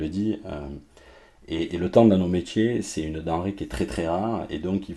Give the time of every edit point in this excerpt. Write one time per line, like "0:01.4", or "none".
none

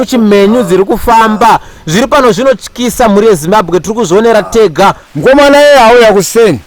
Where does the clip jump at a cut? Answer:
0:05.1

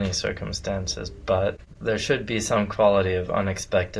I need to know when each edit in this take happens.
0:01.7

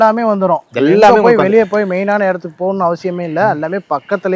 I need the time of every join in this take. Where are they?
none

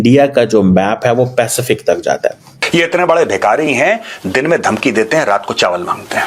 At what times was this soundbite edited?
0:02.5

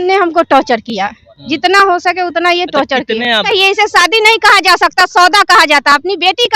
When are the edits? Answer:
0:03.5

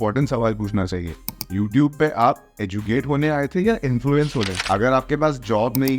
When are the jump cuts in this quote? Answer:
0:04.6

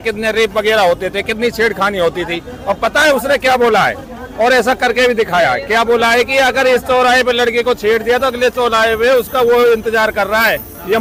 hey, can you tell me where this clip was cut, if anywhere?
none

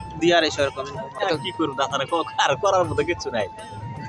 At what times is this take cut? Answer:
none

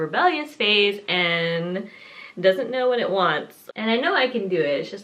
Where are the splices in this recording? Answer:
0:03.6

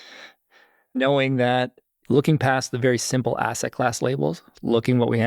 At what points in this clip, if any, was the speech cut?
0:01.0

